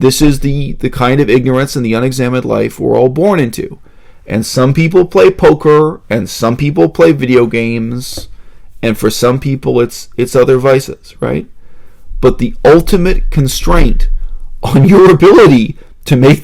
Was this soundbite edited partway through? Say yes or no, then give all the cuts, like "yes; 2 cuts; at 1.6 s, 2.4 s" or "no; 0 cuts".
no; 0 cuts